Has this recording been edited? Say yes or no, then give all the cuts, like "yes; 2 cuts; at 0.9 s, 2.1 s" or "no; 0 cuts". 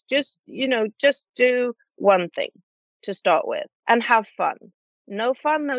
yes; 1 cut; at 3.7 s